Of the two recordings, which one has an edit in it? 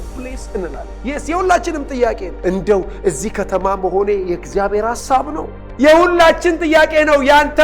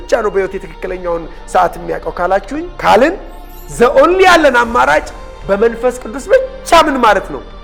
first; 3 cuts; at 0.9 s, 2.3 s, 5.6 s

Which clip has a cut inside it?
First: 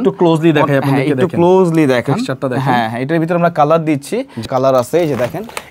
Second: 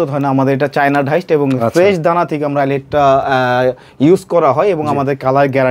first; 1 cut; at 4.5 s

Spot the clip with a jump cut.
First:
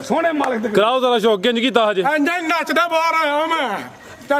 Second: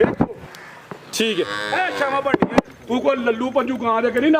second; 1 cut; at 2.7 s

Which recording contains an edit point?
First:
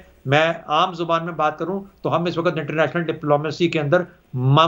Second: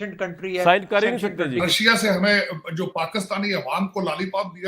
second; 1 cut; at 1.7 s

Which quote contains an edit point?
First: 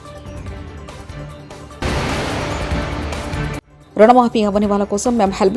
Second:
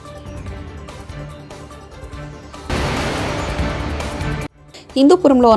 first; 2 cuts; at 1.8 s, 3.7 s

